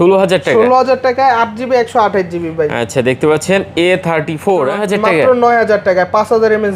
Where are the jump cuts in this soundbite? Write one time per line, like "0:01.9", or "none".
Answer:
0:04.8

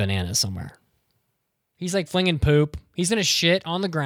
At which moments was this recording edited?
none

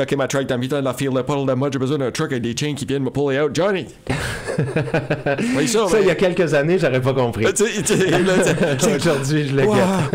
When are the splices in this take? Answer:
none

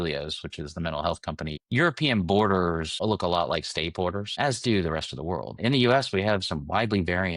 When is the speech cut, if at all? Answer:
0:01.6
0:05.5

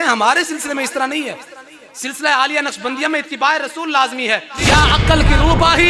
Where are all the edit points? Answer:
0:04.5

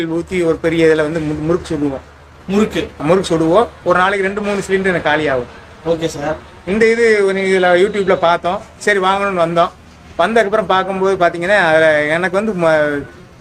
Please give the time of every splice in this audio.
none

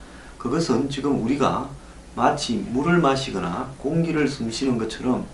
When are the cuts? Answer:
none

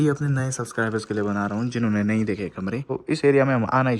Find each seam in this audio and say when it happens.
0:02.9

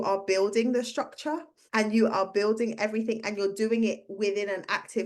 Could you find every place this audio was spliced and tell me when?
0:01.5

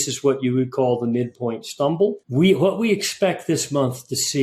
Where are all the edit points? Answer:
0:02.2

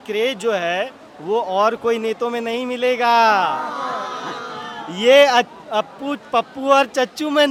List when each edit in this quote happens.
none

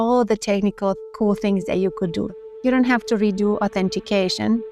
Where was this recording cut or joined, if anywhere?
0:01.1
0:02.3

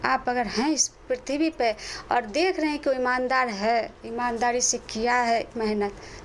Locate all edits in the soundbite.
none

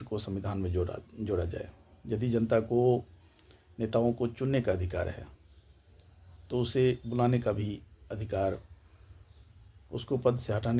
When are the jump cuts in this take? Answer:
none

